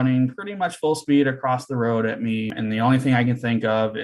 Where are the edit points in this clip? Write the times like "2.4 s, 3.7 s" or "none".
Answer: 2.5 s

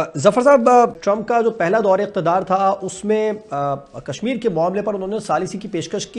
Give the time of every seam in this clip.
0.9 s

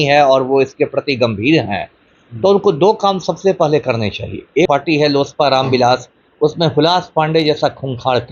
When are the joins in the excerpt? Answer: 4.7 s

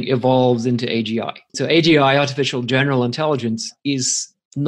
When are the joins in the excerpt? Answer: 1.6 s

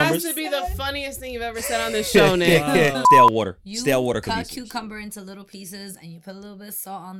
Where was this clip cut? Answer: 3.0 s

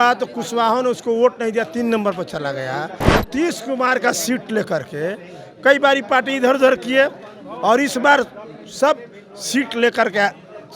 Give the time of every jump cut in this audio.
3.0 s

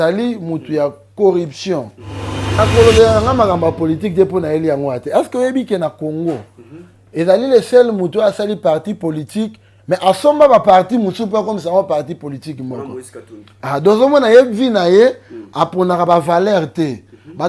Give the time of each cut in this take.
2.6 s

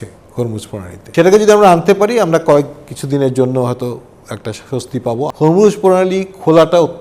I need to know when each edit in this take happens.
1.0 s, 5.3 s

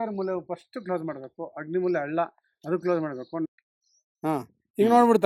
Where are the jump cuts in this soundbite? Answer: 3.5 s

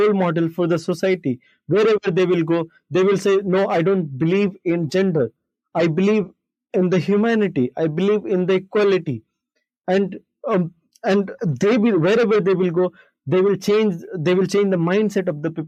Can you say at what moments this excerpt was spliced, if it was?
none

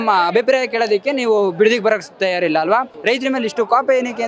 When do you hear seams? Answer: 2.9 s

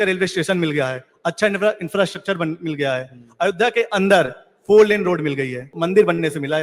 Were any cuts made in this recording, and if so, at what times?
5.7 s

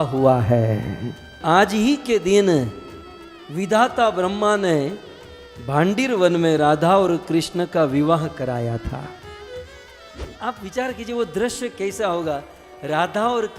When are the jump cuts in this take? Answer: 1.4 s, 10.3 s

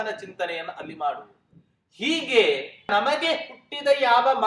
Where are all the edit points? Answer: 2.9 s

